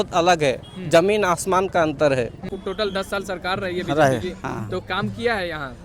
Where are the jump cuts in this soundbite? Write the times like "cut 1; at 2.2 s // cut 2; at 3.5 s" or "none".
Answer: cut 1; at 2.5 s